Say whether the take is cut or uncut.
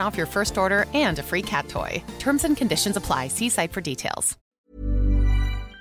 cut